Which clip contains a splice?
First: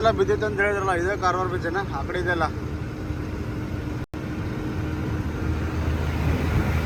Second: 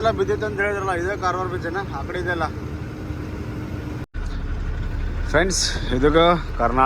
second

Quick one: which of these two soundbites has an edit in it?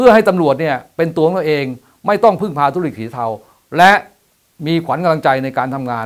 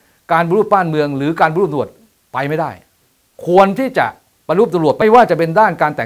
second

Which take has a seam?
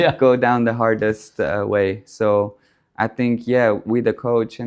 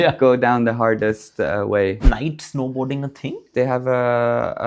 second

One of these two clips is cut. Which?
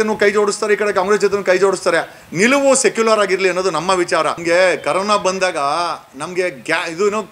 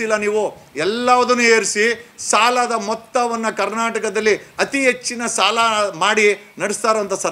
first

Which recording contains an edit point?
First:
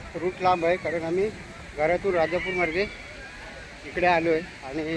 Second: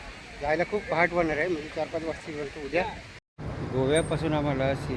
second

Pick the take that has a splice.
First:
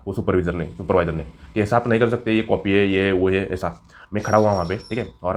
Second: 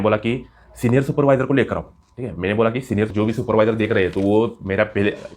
second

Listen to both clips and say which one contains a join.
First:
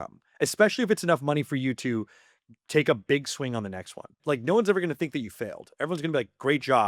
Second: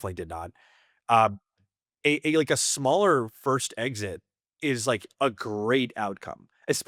first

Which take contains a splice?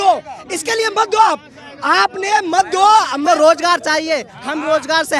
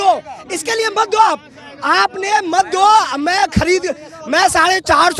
first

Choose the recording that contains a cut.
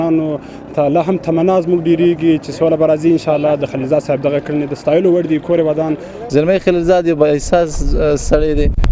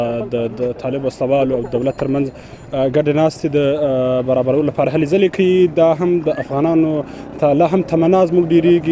first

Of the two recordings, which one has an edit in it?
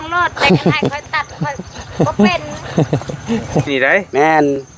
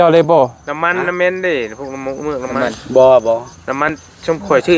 first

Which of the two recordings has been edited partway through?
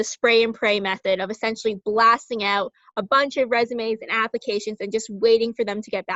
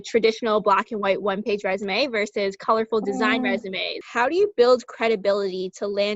second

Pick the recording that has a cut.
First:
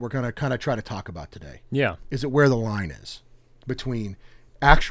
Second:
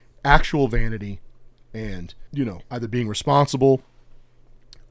second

